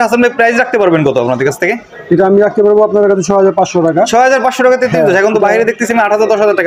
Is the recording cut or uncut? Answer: uncut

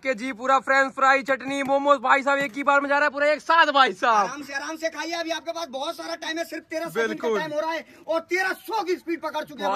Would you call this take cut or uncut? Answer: uncut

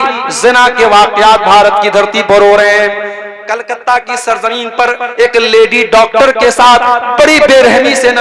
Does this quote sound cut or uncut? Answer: uncut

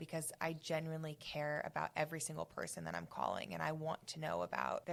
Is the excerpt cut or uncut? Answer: uncut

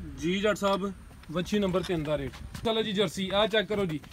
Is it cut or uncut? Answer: cut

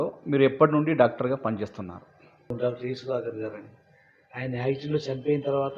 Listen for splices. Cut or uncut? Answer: cut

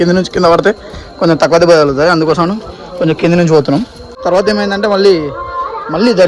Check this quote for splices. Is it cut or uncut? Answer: cut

